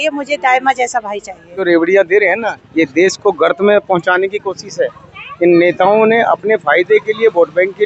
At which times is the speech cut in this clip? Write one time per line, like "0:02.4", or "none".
0:01.6